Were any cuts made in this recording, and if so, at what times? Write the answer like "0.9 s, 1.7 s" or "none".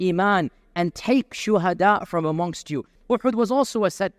2.9 s